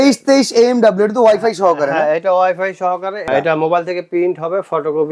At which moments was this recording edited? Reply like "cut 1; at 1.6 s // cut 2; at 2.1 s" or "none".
cut 1; at 3.3 s